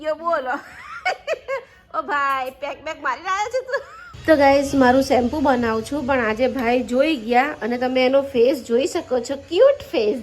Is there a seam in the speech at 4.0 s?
yes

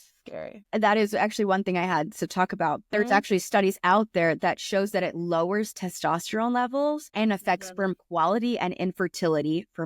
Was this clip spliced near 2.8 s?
yes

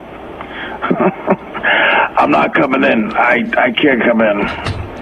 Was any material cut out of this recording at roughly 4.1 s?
no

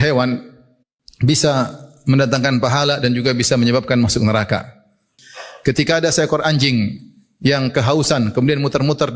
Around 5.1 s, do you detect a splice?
yes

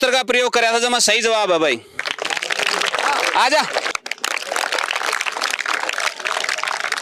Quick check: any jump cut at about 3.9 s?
yes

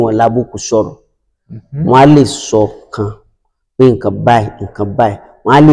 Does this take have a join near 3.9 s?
no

